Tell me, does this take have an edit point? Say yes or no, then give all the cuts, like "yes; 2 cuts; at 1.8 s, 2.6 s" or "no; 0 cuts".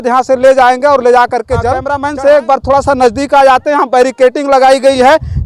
yes; 1 cut; at 2.0 s